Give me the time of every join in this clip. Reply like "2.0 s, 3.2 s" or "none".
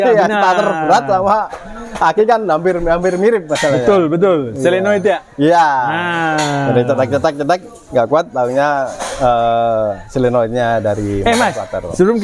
none